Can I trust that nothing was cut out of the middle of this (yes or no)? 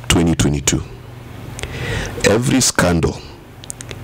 yes